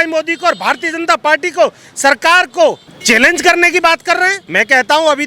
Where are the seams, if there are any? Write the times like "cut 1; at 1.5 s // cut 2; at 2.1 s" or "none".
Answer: cut 1; at 2.9 s // cut 2; at 4.4 s